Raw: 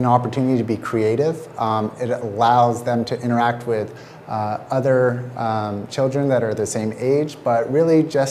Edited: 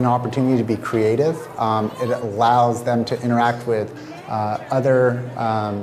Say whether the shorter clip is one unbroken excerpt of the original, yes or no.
yes